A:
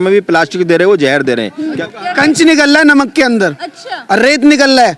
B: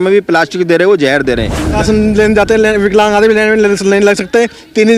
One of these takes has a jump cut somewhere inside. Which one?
B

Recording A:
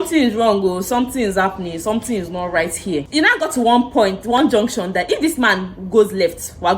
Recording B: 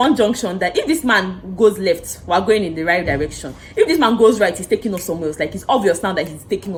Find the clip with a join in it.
A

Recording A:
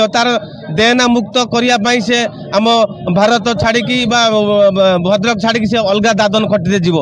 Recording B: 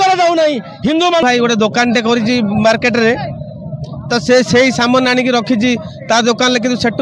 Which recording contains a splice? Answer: B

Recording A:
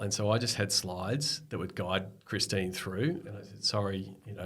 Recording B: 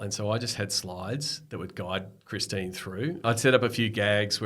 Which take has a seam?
B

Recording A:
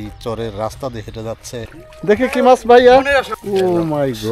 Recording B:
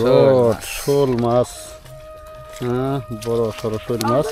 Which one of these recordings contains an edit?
A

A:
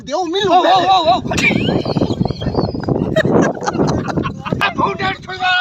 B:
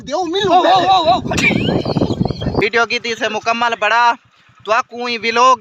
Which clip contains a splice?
B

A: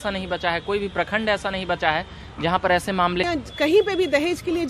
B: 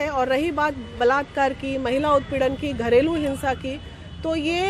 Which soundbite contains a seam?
A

